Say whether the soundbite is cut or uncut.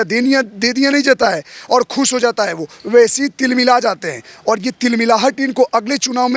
uncut